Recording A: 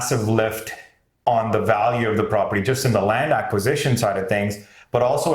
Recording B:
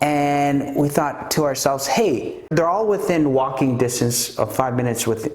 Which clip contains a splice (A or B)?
B